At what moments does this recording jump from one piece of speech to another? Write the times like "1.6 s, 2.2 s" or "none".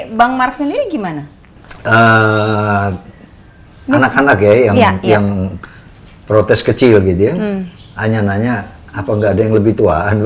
none